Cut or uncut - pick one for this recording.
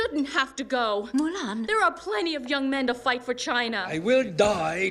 cut